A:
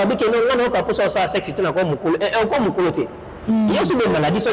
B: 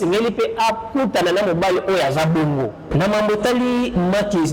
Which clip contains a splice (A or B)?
B